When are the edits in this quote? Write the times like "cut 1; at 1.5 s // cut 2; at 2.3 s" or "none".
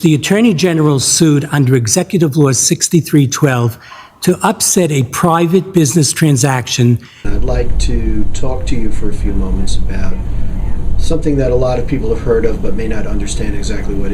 cut 1; at 7.2 s